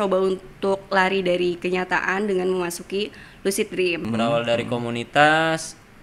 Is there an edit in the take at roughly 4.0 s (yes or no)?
yes